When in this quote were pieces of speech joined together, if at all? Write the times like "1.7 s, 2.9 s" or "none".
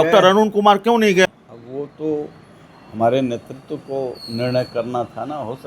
1.1 s